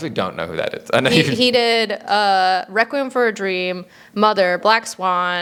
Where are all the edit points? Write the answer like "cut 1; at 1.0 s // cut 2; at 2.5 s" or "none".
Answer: none